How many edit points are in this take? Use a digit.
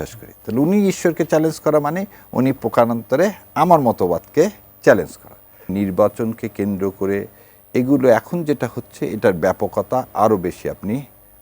1